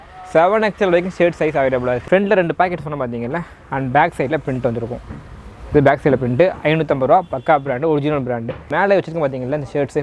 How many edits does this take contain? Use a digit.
2